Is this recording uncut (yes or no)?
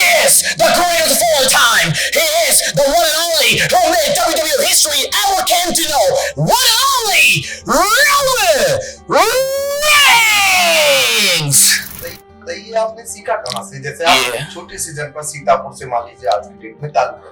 no